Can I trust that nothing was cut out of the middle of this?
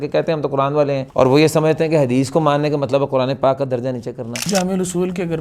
no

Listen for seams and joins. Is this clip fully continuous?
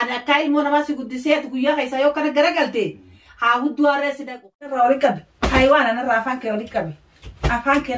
no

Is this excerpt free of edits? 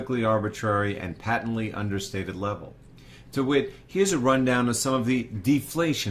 yes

